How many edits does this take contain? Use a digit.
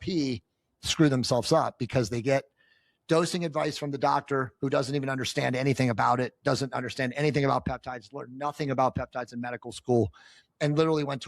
0